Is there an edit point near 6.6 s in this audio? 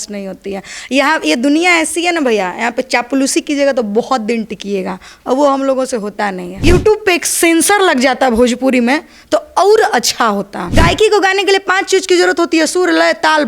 yes; 2 cuts; at 6.6 s, 10.6 s

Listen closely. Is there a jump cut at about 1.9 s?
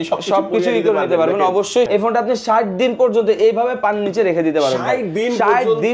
yes; 1 cut; at 1.9 s

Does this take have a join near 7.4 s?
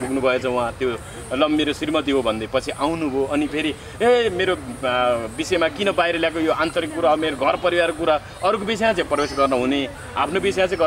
no; 0 cuts

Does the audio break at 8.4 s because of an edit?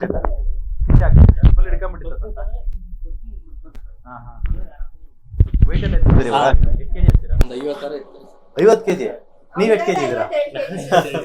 no; 0 cuts

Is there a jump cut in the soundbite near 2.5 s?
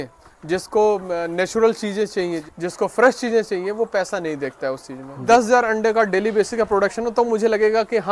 yes; 2 cuts; at 2.5 s, 5.2 s

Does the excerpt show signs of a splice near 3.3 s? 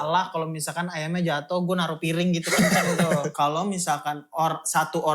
yes; 1 cut; at 3.3 s

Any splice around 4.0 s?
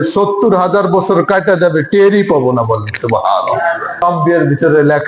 yes; 1 cut; at 4.0 s

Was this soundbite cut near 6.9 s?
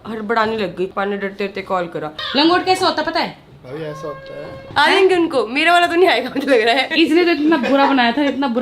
yes; 4 cuts; at 0.9 s, 2.1 s, 4.6 s, 6.9 s

